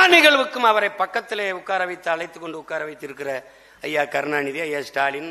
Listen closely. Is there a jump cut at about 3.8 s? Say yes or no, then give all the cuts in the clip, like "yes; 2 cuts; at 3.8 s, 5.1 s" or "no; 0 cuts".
no; 0 cuts